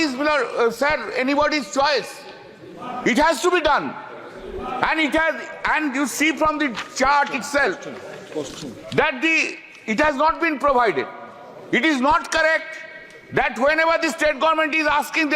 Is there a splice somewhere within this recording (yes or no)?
no